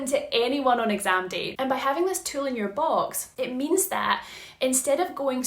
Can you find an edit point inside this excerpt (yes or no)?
yes